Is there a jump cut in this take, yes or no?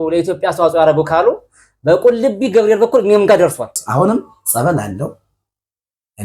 yes